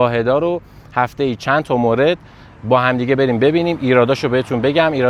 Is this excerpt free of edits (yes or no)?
yes